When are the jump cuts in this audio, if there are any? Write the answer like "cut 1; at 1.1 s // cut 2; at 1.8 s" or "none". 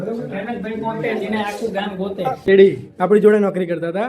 cut 1; at 2.3 s